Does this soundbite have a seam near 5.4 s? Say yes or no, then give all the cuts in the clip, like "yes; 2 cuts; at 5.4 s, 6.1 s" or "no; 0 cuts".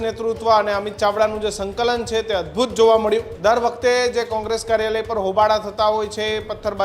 no; 1 cut; at 3.3 s